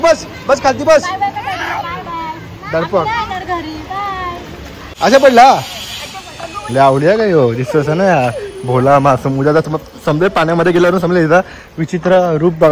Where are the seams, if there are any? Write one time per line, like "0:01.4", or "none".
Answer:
0:04.9